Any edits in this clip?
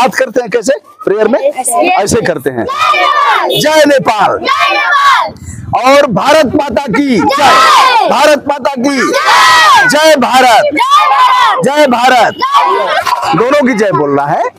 yes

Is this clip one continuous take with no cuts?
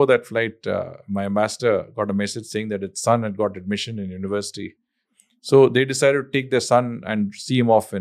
yes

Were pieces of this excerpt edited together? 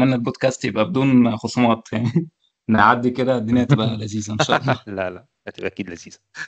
no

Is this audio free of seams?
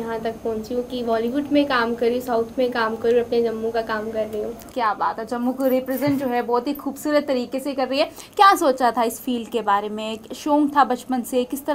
yes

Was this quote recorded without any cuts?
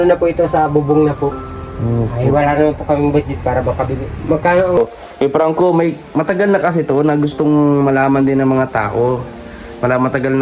no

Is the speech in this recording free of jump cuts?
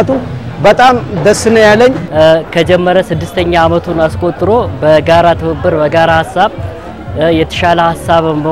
no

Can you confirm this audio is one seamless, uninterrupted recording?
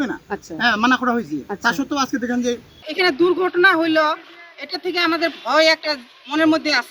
no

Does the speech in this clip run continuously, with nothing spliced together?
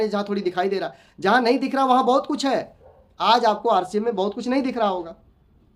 yes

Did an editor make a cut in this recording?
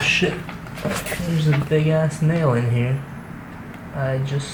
no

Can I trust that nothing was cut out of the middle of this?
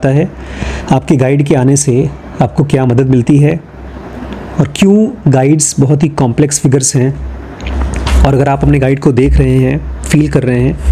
yes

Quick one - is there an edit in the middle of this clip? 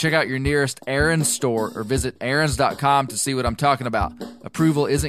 no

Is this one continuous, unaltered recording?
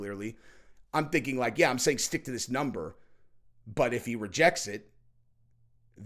yes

